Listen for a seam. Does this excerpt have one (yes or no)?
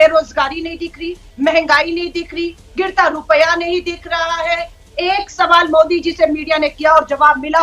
yes